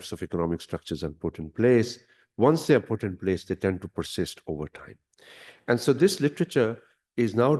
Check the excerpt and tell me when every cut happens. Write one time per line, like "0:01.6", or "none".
none